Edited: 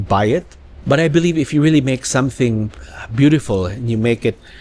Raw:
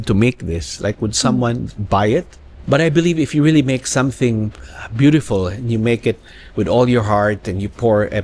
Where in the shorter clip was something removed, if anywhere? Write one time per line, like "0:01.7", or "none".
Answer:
none